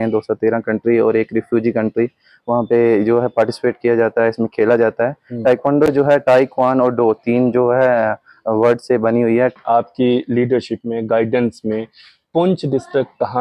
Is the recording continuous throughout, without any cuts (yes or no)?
no